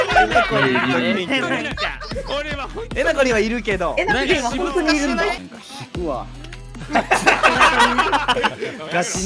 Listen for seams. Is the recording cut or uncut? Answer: cut